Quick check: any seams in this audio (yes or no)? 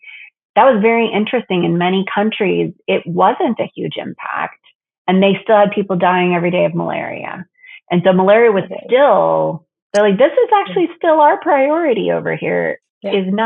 no